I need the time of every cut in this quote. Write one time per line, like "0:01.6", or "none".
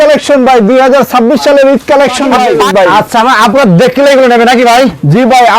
0:02.6